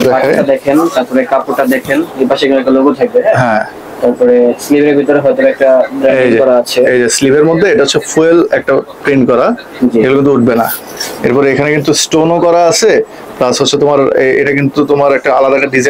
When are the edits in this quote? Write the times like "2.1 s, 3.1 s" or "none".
none